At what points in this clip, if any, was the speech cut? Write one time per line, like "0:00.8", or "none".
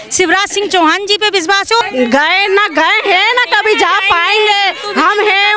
0:01.8

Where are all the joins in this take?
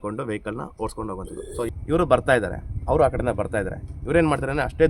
0:01.7

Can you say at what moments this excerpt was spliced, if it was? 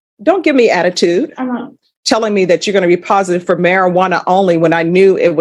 0:01.9

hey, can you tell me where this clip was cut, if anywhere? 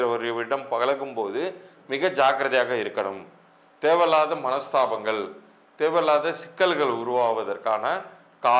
none

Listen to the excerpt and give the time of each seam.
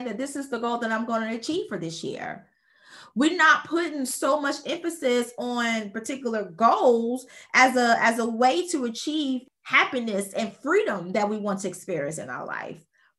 0:09.5

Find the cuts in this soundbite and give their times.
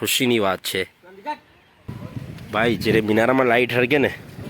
0:01.9

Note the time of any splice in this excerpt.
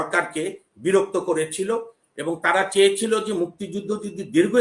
none

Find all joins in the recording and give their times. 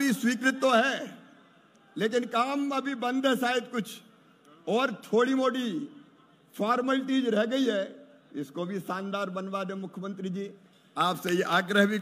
none

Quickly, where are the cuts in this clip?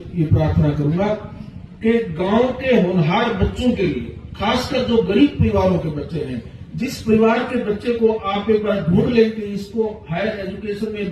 none

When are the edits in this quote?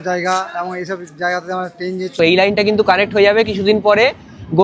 0:02.1

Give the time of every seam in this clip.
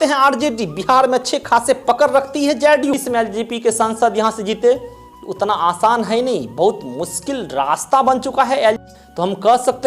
0:02.9
0:08.9

